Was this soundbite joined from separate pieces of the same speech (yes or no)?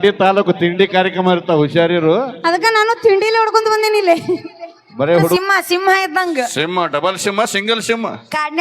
yes